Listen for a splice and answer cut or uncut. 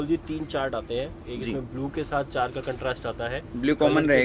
uncut